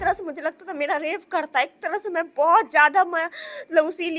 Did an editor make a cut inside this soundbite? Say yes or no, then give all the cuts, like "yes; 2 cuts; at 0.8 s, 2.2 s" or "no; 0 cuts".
no; 0 cuts